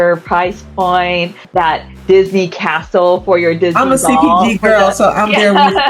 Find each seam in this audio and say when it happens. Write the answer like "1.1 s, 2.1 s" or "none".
1.4 s